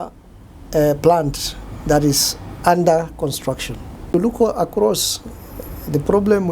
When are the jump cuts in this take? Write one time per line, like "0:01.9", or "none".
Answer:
0:04.1